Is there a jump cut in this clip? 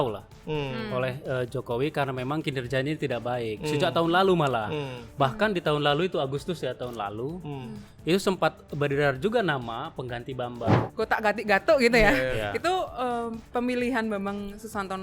yes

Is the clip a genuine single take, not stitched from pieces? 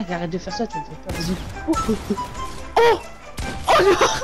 yes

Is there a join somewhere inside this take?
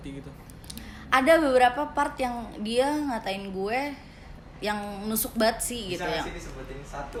no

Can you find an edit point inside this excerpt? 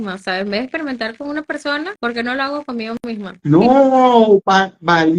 yes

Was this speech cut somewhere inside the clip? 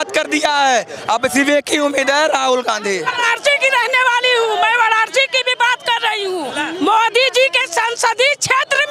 yes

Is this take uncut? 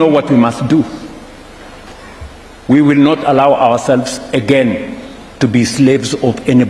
no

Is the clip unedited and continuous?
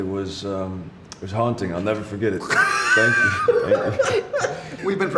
yes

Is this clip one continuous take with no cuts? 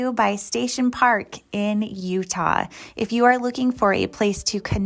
yes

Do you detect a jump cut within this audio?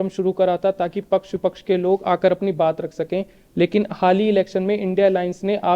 no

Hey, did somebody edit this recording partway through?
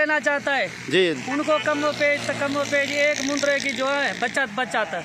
no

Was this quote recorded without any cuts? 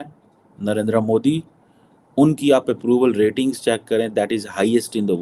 yes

